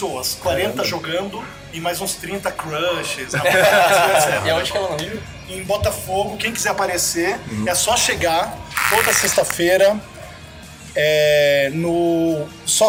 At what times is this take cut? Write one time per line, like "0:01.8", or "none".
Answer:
none